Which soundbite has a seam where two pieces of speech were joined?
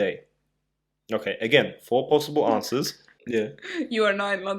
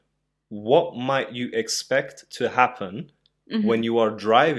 first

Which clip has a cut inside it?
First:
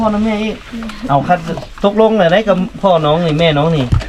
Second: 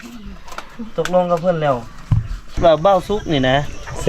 second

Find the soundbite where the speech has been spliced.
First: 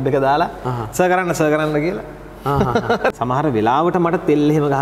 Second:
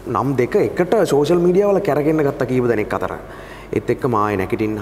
first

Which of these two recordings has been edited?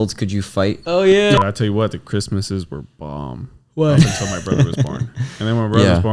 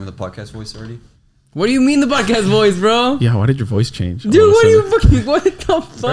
first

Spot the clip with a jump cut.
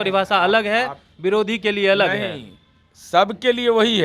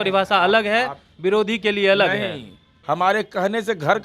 second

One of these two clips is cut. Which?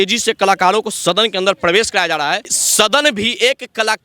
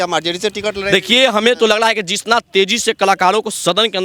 first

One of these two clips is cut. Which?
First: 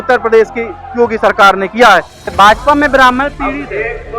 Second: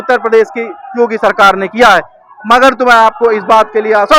first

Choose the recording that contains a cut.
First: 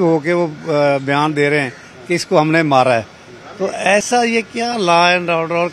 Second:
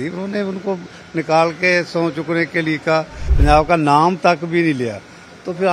second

